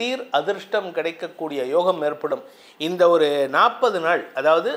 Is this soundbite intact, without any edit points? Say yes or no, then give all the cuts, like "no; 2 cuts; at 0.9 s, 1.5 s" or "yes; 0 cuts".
yes; 0 cuts